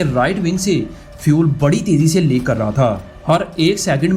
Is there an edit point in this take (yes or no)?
no